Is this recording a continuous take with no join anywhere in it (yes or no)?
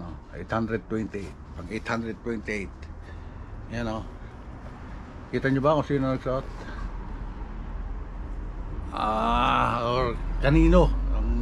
yes